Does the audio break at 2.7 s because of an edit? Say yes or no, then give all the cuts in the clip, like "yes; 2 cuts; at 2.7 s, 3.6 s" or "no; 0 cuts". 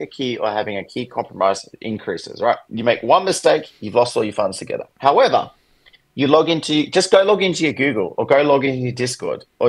yes; 1 cut; at 2.7 s